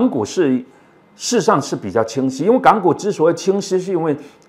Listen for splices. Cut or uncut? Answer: uncut